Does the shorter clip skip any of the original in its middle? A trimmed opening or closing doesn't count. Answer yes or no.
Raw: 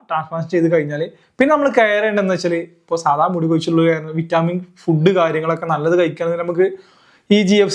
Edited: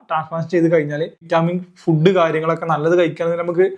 yes